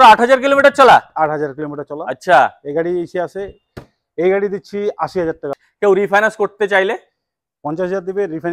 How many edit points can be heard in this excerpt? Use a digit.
1